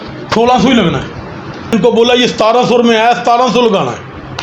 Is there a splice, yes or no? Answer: yes